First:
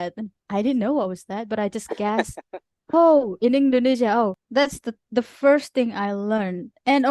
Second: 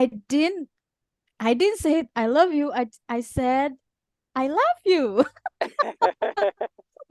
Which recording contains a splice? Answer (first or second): first